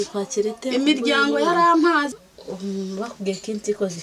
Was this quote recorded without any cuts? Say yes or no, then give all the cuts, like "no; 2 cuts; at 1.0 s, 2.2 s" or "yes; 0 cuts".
no; 1 cut; at 2.1 s